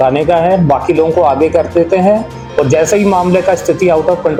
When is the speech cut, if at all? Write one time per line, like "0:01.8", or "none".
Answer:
none